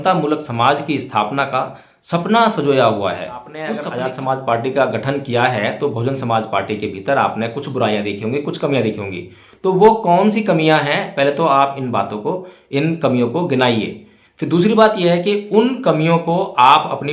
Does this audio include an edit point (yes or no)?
yes